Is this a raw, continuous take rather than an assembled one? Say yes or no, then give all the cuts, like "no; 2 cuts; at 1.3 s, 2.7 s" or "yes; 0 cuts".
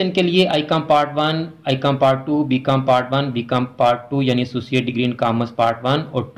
yes; 0 cuts